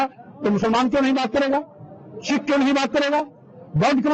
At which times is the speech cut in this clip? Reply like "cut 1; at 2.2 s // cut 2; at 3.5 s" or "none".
none